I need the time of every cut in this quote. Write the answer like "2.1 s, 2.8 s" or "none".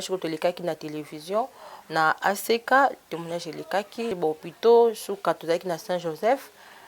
4.1 s